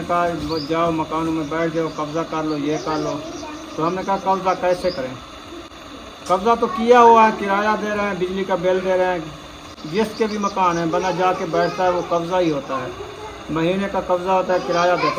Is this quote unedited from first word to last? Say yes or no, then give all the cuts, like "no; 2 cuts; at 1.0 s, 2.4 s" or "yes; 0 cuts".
yes; 0 cuts